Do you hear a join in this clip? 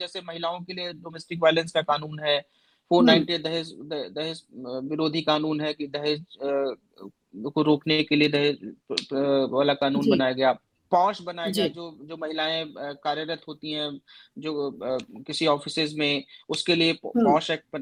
no; 0 cuts

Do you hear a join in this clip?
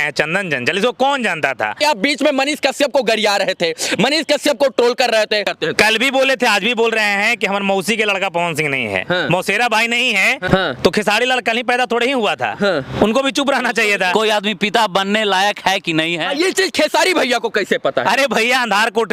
yes; 4 cuts; at 1.8 s, 5.5 s, 10.4 s, 14.1 s

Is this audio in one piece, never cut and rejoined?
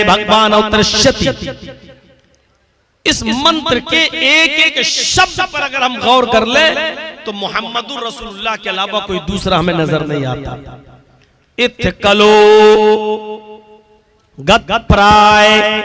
yes; 0 cuts

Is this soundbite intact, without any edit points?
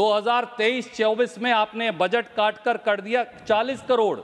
yes; 0 cuts

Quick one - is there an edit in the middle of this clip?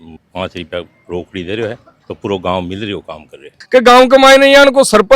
yes; 1 cut; at 3.6 s

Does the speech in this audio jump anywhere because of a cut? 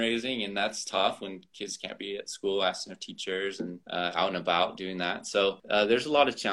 yes; 2 cuts; at 3.8 s, 5.6 s

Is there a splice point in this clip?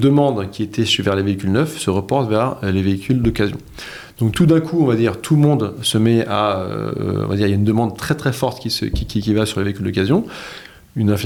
no; 0 cuts

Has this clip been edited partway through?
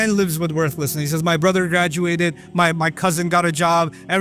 no; 0 cuts

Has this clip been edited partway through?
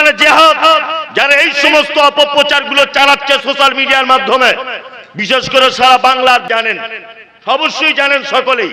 yes; 1 cut; at 6.5 s

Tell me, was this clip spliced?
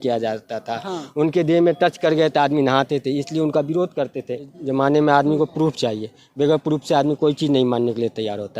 yes; 1 cut; at 4.6 s

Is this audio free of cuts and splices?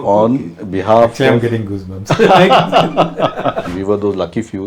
no; 1 cut; at 3.7 s

